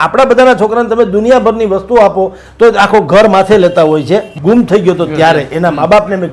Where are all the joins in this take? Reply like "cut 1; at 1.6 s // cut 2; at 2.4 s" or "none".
cut 1; at 4.3 s